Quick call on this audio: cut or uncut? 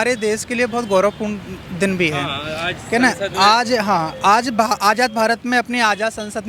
uncut